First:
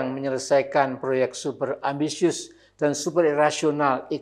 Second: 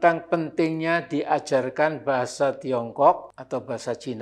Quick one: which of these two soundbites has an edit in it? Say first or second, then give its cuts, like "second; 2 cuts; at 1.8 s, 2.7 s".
second; 1 cut; at 3.3 s